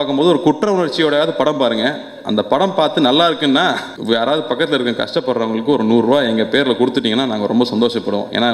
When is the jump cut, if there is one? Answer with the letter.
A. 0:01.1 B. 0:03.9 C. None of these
B